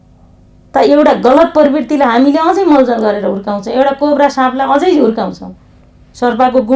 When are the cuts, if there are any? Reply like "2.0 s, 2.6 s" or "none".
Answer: none